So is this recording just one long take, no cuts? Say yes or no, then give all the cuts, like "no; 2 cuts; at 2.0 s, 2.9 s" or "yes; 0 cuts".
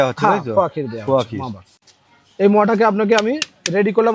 yes; 0 cuts